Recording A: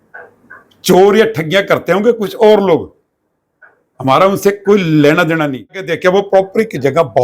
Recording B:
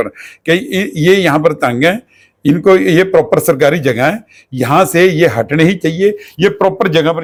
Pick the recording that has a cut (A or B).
A